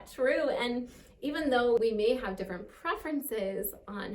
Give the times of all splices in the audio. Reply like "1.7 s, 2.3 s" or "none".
1.8 s